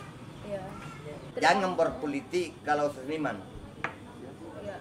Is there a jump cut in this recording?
yes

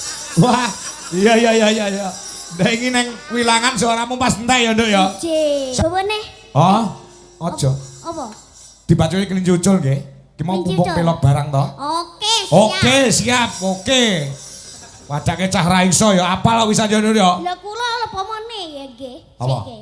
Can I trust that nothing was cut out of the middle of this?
no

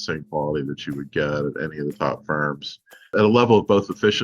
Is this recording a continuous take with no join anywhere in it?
no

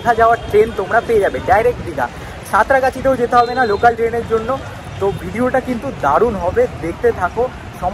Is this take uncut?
yes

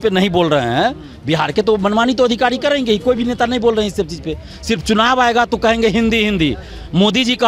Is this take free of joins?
yes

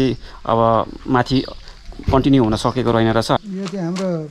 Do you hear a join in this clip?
yes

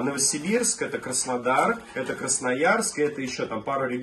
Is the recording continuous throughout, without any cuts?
yes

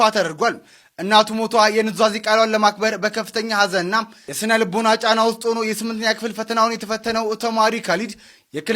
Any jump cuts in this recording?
no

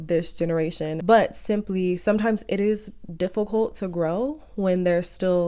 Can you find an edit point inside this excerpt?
yes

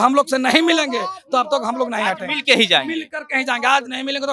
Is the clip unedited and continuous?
yes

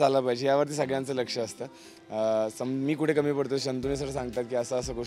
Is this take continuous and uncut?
yes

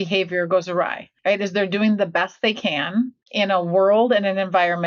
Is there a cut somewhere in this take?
yes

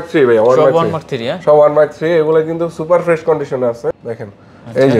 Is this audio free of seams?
no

